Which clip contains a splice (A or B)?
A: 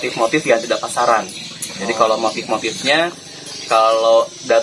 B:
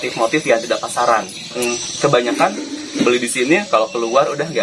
B